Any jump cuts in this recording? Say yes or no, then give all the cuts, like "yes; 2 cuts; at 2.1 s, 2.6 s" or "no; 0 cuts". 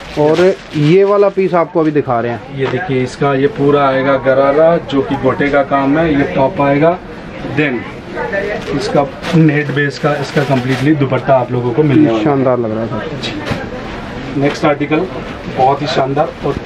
no; 0 cuts